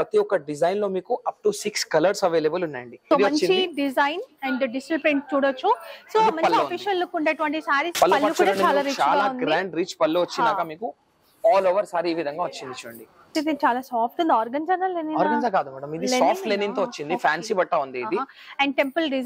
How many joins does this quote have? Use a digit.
3